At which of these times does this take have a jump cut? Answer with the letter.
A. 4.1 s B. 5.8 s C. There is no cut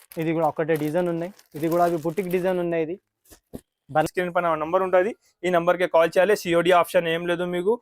A